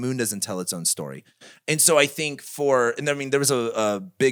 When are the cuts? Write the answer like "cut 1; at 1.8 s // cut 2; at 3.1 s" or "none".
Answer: none